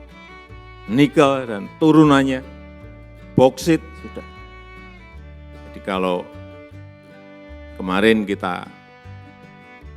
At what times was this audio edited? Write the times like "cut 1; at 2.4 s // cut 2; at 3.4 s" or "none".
cut 1; at 0.8 s // cut 2; at 8.7 s